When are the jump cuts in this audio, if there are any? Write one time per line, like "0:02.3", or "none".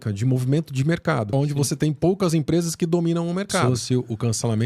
0:01.3
0:03.6